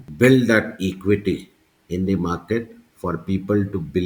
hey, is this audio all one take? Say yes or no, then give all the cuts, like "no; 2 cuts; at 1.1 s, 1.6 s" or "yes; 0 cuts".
yes; 0 cuts